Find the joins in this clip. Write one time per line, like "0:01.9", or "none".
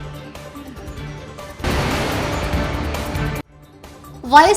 0:01.3

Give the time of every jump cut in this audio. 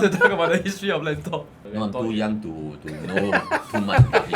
0:01.6

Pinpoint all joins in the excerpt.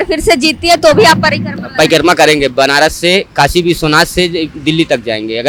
none

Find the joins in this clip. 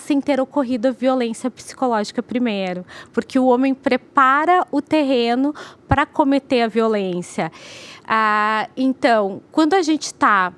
none

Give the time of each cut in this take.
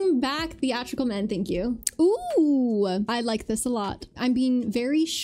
0:01.8
0:03.1

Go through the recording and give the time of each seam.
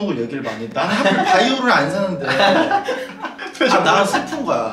0:03.4

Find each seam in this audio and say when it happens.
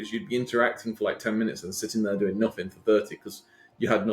none

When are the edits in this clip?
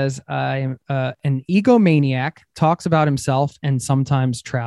none

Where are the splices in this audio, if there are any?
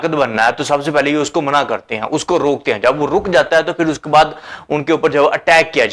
none

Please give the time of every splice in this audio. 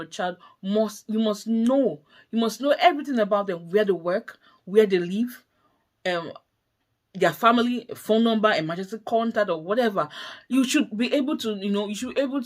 none

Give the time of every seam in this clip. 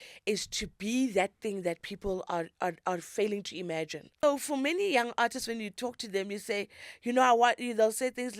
0:04.2

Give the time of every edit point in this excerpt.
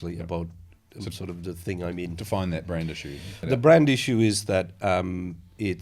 0:03.4

